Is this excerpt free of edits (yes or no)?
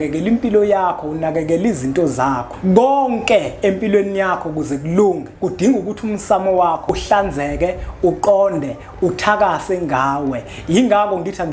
no